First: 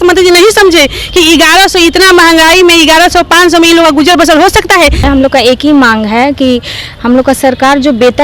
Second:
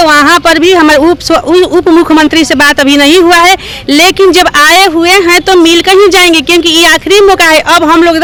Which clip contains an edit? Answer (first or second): first